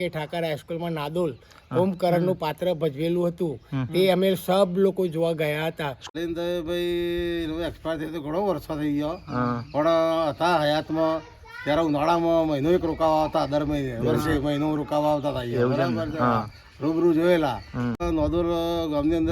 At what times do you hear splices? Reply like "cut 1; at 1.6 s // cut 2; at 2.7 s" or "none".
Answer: cut 1; at 5.9 s // cut 2; at 18.0 s